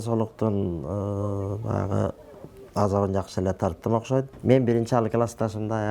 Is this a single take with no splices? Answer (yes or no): no